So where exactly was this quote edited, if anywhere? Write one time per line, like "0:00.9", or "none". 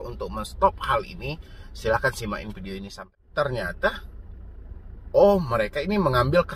0:03.2